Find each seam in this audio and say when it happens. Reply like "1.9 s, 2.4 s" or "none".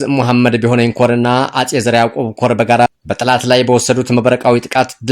2.9 s